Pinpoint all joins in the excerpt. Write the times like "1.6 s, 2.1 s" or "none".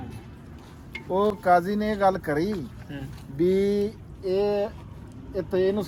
none